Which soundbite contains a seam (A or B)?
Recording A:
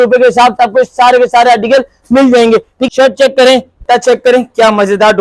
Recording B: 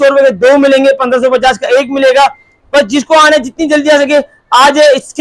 A